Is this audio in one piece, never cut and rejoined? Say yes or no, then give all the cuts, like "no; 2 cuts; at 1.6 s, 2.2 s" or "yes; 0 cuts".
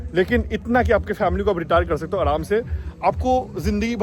yes; 0 cuts